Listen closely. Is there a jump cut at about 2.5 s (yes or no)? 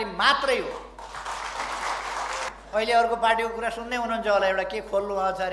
yes